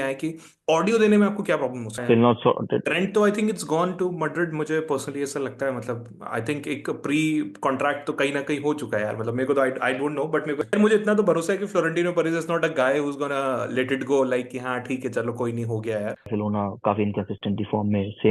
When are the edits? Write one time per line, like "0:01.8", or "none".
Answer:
0:02.0
0:10.7
0:16.3